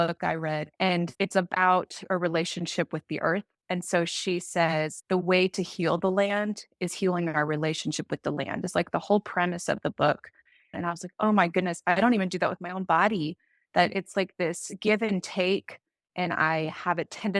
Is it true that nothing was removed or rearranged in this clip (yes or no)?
no